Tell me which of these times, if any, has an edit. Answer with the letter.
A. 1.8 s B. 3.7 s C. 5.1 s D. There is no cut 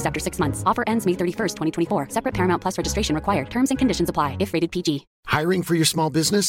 C